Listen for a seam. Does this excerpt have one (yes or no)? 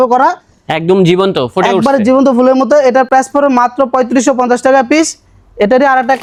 no